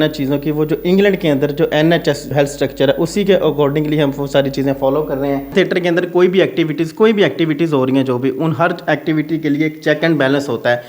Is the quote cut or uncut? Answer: cut